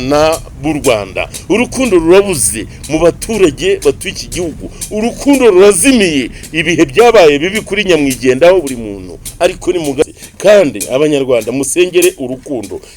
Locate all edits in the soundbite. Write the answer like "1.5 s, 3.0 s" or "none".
10.0 s